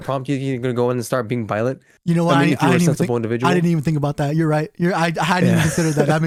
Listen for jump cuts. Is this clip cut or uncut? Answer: uncut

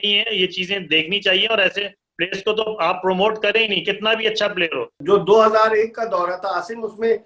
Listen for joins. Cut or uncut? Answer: cut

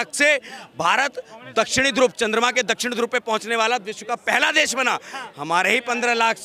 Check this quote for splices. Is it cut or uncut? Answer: uncut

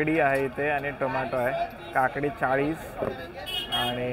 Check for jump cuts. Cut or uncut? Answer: uncut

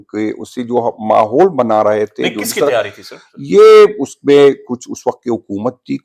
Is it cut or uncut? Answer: uncut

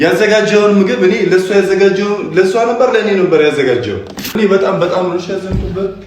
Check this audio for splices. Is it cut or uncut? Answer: cut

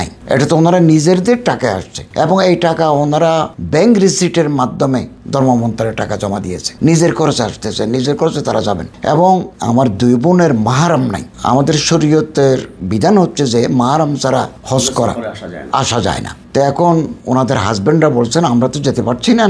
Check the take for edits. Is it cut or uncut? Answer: uncut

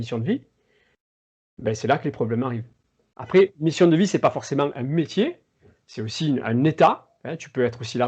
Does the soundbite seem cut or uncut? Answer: cut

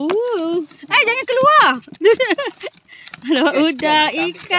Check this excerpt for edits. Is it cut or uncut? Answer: uncut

